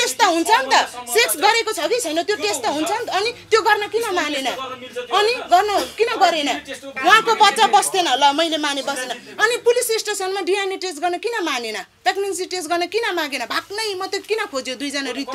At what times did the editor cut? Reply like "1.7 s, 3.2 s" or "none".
6.9 s